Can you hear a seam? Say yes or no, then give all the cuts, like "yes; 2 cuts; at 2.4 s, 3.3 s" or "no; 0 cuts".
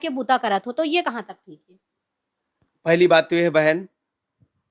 no; 0 cuts